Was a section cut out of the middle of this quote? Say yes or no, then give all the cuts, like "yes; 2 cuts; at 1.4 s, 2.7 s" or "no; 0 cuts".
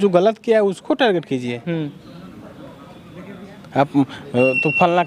no; 0 cuts